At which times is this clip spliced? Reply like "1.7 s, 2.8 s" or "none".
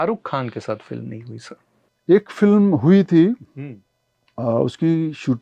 none